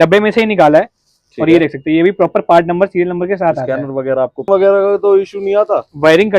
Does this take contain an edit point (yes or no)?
yes